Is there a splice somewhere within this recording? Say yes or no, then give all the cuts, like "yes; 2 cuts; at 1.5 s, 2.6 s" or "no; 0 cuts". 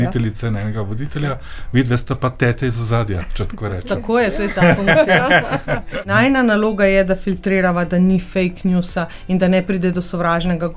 yes; 1 cut; at 5.8 s